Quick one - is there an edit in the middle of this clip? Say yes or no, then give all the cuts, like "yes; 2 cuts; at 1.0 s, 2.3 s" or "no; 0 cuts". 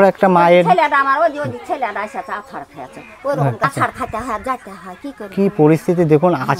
yes; 1 cut; at 3.6 s